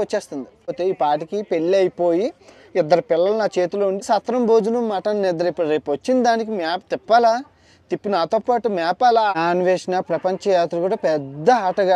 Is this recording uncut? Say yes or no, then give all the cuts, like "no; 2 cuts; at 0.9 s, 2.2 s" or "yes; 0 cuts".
no; 3 cuts; at 0.8 s, 4.0 s, 9.3 s